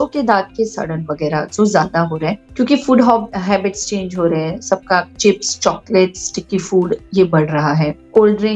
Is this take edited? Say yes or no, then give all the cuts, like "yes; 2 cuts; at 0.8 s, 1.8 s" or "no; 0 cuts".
no; 0 cuts